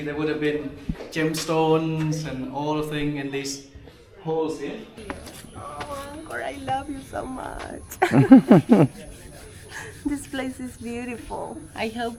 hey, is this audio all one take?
no; 1 cut; at 4.9 s

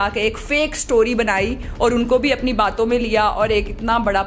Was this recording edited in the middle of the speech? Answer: no; 0 cuts

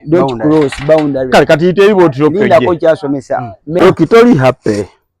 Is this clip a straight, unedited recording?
no; 1 cut; at 3.8 s

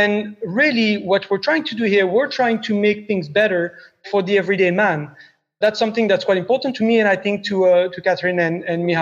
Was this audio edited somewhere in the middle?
yes; 4 cuts; at 4.1 s, 5.6 s, 6.7 s, 8.0 s

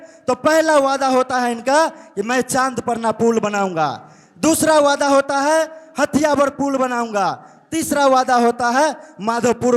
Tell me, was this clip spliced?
no; 0 cuts

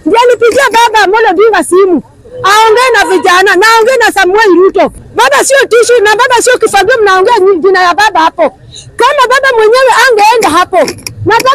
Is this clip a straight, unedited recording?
no; 1 cut; at 5.0 s

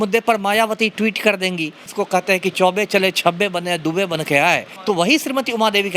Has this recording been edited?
yes; 2 cuts; at 1.8 s, 4.7 s

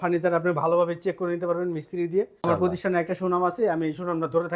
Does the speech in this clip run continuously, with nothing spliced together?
no; 1 cut; at 2.5 s

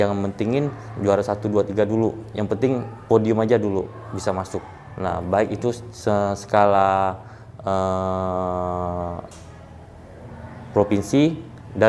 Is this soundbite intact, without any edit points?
yes; 0 cuts

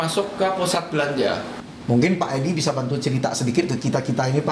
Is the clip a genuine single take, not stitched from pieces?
no; 1 cut; at 1.5 s

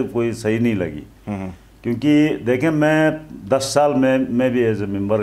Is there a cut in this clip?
no; 0 cuts

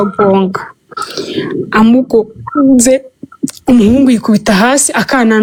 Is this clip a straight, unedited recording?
yes; 0 cuts

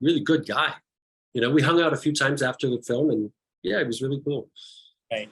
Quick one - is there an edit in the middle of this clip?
no; 0 cuts

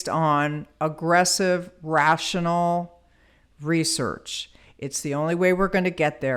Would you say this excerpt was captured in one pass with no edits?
yes; 0 cuts

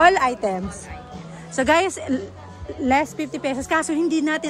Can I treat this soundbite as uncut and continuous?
yes; 0 cuts

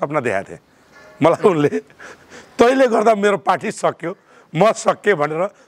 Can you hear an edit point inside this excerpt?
no; 0 cuts

